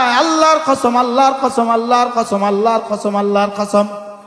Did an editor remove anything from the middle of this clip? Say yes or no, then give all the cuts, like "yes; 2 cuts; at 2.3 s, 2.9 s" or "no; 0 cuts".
no; 0 cuts